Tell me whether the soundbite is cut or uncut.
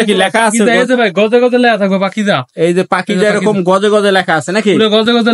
uncut